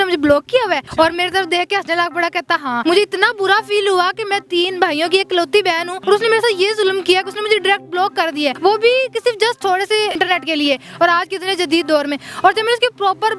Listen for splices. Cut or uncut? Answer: cut